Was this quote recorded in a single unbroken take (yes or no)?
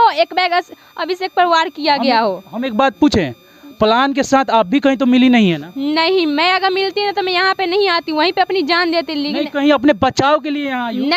yes